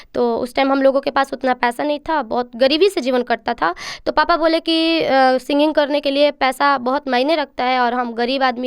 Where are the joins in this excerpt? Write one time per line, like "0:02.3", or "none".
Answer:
none